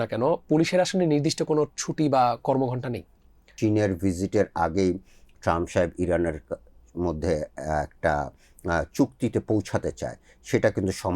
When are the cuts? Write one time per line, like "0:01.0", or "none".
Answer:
0:03.5